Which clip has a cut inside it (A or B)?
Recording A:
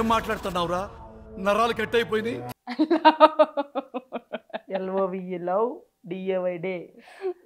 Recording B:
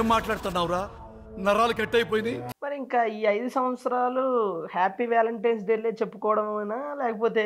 B